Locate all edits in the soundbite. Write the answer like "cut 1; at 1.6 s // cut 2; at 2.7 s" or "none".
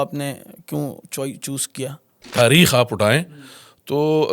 cut 1; at 2.3 s